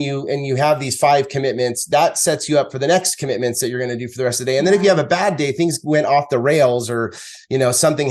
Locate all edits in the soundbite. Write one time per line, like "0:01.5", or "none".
none